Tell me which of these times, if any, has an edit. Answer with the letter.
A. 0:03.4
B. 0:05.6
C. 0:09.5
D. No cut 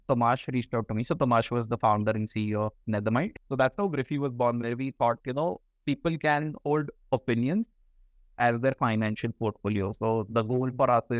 A